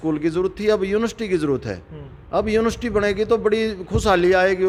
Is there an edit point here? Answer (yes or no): no